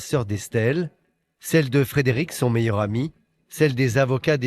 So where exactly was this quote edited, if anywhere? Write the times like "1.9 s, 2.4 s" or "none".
none